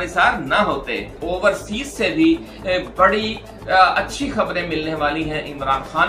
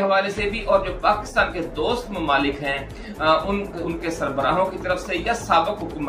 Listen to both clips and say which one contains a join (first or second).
first